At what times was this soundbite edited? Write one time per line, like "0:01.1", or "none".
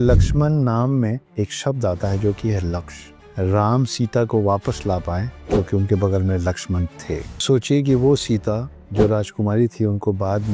0:01.2
0:03.2
0:05.3
0:07.4

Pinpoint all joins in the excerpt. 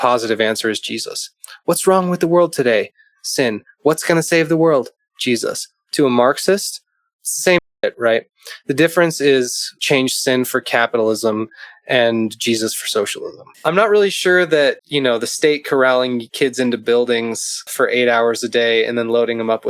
0:09.7
0:13.4
0:14.9
0:16.3
0:17.7

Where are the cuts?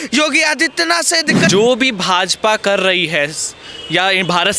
0:01.5

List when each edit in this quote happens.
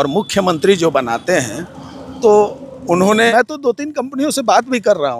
0:03.3

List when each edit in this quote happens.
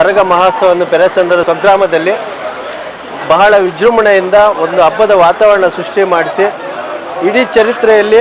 0:01.4

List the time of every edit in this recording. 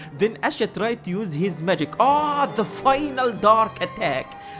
none

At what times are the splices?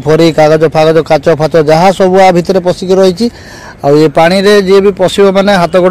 none

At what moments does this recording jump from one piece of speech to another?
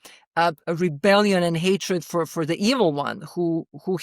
0:02.3

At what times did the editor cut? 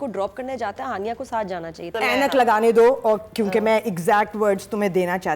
0:02.0

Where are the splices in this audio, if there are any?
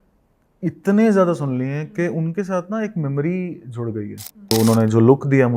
0:04.5

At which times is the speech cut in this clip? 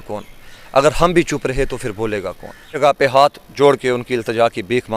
0:02.8

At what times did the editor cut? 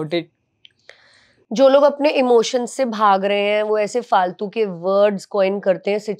none

